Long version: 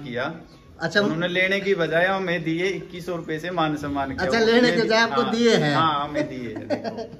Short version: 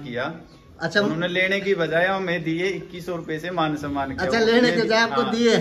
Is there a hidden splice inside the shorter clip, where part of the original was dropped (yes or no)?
no